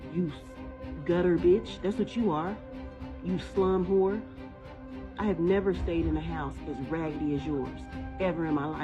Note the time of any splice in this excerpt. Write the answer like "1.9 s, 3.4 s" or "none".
6.7 s

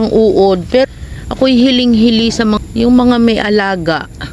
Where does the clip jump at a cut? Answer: 0.9 s, 2.6 s

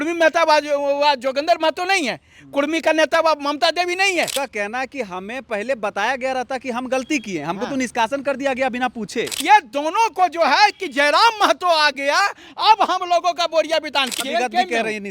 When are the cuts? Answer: 4.3 s, 9.3 s, 14.1 s

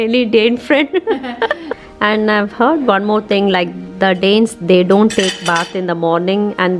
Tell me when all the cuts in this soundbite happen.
1.8 s

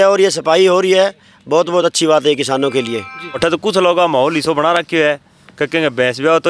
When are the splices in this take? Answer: 3.4 s

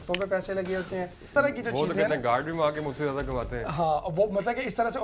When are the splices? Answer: 1.3 s

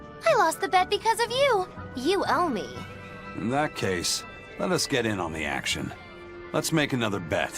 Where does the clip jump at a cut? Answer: 1.7 s

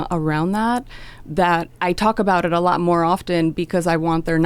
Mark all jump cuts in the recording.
1.7 s

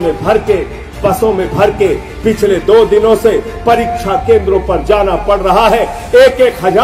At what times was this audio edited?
none

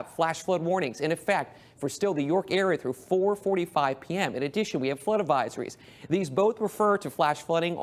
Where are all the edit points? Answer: none

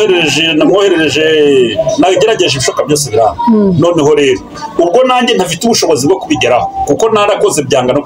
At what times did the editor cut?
none

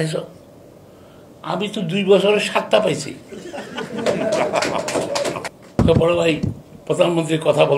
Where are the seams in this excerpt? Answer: 5.4 s

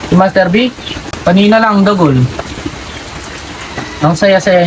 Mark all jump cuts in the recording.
1.1 s

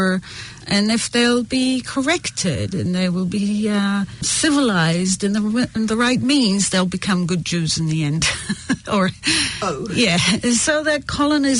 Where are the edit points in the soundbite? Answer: none

